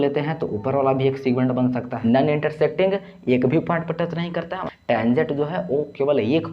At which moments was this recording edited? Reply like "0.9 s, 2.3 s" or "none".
1.9 s, 4.6 s